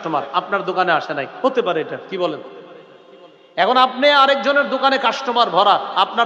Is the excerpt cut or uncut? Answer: uncut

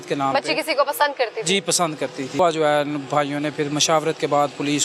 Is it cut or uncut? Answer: cut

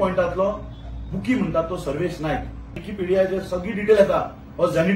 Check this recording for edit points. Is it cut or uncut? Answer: cut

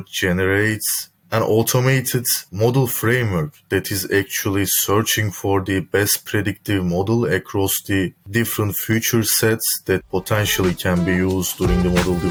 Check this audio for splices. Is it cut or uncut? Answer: uncut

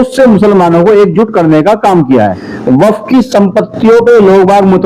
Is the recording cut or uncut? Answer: cut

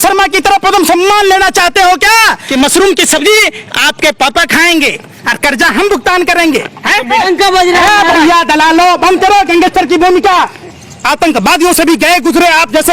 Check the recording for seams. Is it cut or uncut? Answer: cut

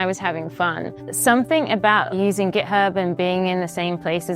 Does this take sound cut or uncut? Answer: cut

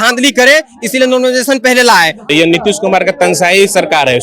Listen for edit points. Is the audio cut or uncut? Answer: cut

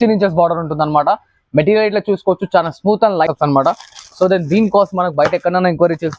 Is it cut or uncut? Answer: cut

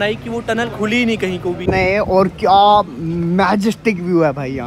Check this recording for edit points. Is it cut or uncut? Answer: cut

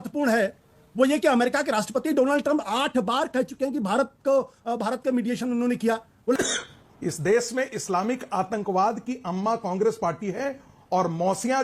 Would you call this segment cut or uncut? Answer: cut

